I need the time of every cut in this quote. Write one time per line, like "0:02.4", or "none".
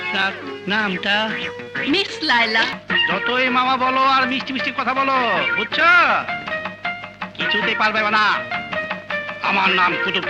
0:02.7